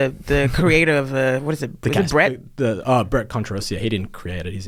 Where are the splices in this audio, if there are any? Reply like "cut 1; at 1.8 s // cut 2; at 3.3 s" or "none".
none